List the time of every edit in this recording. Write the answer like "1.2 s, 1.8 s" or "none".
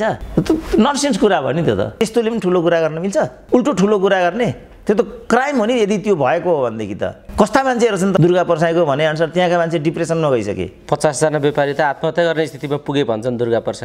1.9 s, 3.4 s, 8.2 s